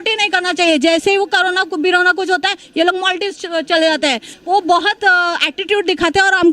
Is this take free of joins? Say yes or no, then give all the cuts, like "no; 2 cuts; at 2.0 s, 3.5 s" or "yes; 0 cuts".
no; 1 cut; at 4.3 s